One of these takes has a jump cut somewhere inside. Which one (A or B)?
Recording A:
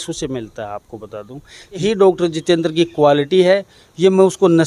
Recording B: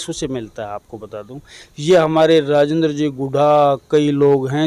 A